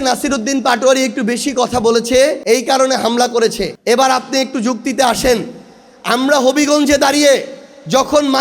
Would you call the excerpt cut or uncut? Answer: cut